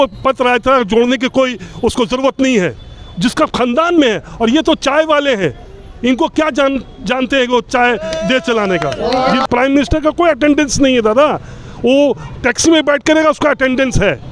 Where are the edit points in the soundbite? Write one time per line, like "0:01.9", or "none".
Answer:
0:09.5